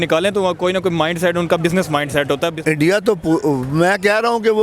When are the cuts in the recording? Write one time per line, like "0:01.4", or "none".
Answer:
0:02.6